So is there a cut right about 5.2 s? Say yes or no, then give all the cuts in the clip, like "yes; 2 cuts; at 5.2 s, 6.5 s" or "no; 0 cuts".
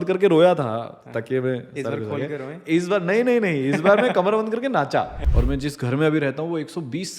yes; 1 cut; at 5.2 s